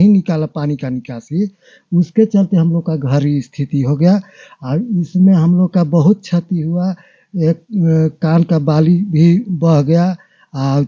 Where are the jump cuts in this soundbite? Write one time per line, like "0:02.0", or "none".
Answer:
none